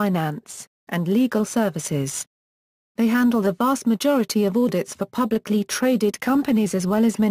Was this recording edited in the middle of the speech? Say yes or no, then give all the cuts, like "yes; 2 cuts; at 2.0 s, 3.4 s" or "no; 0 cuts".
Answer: yes; 1 cut; at 2.5 s